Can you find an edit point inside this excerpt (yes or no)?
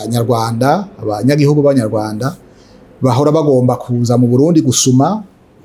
no